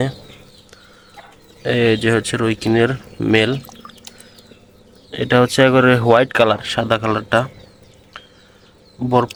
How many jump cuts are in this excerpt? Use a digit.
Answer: 0